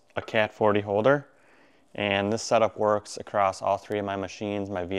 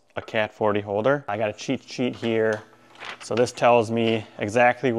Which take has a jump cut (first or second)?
second